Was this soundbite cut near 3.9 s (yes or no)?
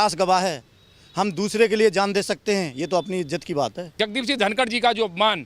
yes